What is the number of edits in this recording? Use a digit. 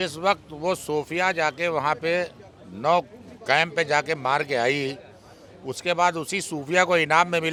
0